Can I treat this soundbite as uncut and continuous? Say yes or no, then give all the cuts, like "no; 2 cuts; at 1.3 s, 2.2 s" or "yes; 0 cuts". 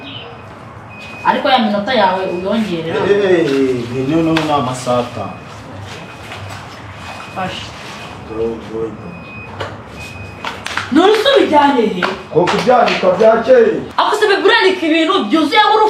yes; 0 cuts